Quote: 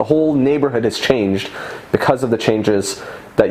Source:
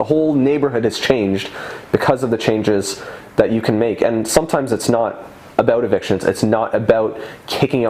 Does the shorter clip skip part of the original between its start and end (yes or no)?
no